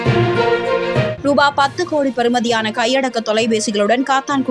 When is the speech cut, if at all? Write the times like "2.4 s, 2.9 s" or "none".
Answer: 1.1 s